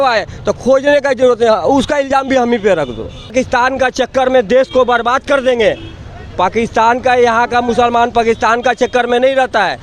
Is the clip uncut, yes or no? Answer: no